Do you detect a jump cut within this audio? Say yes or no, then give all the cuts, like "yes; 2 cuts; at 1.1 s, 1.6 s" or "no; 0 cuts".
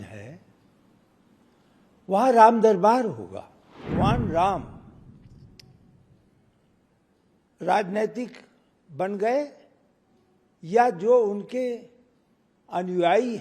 yes; 1 cut; at 3.9 s